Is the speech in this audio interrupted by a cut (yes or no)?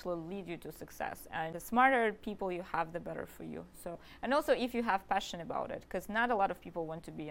yes